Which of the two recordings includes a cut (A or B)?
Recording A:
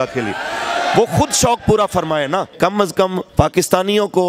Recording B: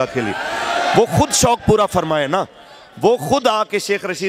A